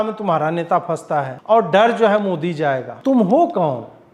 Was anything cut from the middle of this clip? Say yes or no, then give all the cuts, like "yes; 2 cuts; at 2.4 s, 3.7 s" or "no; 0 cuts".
yes; 2 cuts; at 1.3 s, 2.9 s